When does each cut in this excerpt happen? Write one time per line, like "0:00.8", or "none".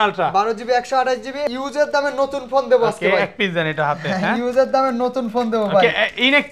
0:01.5

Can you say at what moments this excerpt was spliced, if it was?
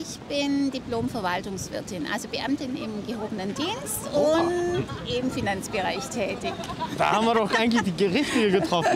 none

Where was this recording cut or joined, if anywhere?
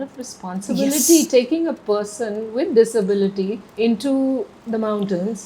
0:03.6
0:04.6

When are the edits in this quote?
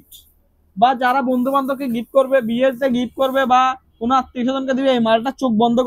none

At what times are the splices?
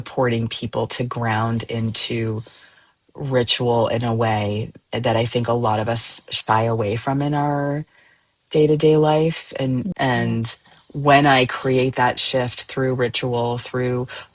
0:09.9

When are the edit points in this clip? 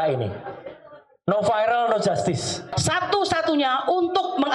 0:02.7

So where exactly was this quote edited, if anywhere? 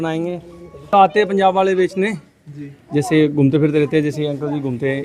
0:00.9

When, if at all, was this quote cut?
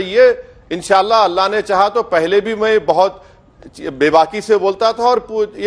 none

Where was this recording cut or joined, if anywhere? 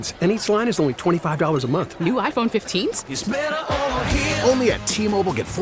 none

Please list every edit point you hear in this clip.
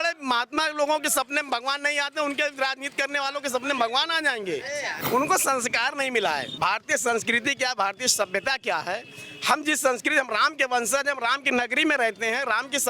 0:05.0
0:06.5

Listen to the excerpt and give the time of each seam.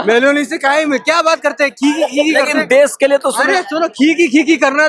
none

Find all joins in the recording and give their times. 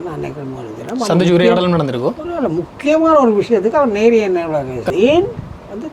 0:04.9

